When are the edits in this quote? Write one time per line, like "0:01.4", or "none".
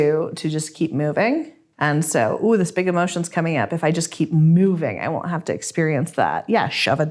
0:01.6